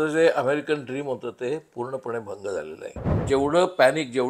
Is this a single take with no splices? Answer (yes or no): no